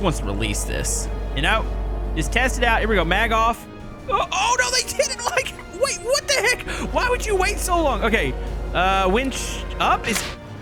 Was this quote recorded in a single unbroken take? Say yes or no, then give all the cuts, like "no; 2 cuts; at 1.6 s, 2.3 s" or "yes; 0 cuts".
yes; 0 cuts